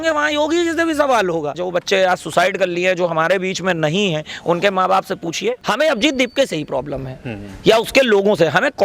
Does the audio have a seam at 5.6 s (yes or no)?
yes